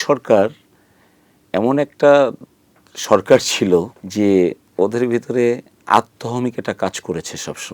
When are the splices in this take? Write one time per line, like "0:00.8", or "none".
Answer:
0:04.0
0:04.6

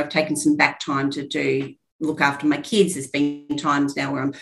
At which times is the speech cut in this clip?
none

